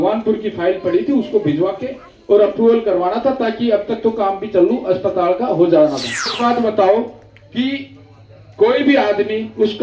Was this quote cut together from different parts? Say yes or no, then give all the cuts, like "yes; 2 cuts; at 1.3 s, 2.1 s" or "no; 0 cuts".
yes; 1 cut; at 6.3 s